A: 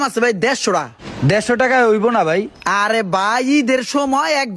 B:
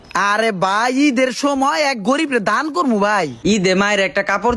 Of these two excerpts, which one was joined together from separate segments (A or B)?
B